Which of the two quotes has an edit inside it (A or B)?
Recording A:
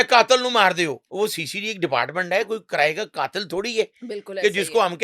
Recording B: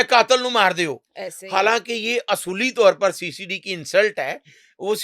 A